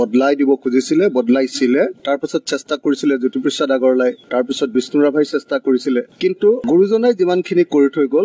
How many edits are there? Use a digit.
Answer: 1